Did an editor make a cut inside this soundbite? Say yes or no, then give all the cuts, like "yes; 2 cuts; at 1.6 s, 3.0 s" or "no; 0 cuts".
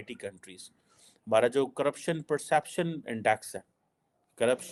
no; 0 cuts